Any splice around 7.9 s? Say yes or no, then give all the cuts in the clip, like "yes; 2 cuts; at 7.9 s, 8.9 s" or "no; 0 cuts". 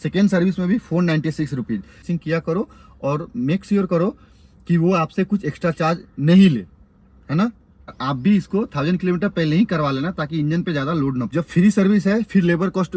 yes; 3 cuts; at 2.0 s, 7.9 s, 11.3 s